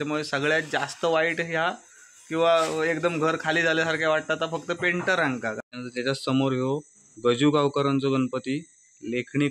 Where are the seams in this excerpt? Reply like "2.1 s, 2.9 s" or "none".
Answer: 5.6 s